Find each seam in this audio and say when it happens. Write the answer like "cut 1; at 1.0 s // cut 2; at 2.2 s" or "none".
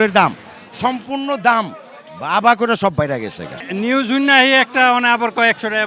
cut 1; at 3.6 s